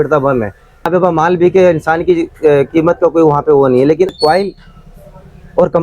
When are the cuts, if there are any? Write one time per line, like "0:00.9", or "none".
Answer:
0:00.9
0:04.1